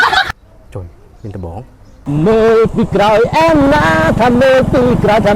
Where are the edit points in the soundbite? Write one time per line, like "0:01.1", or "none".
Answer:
0:02.0